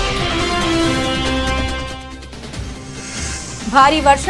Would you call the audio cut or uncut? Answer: uncut